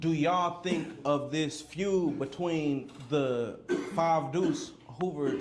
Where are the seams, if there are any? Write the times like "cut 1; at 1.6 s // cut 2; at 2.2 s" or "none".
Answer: none